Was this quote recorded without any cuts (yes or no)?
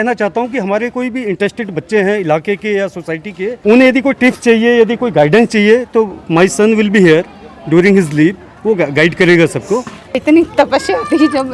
no